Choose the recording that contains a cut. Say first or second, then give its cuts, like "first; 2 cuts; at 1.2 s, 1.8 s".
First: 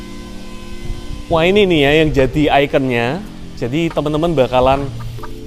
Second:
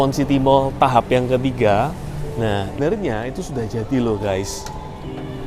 second; 1 cut; at 2.8 s